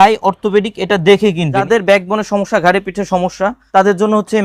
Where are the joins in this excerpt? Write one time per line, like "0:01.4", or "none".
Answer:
0:01.7
0:03.6